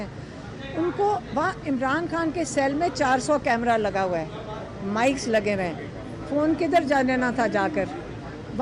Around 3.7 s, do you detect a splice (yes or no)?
no